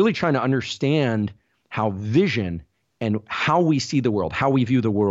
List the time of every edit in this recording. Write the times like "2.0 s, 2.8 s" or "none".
none